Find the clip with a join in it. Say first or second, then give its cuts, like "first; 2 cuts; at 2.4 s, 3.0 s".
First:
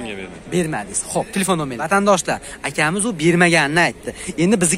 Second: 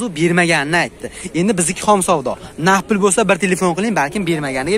first; 1 cut; at 1.8 s